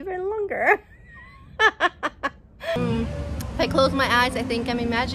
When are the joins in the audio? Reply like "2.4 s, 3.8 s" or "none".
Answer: 2.8 s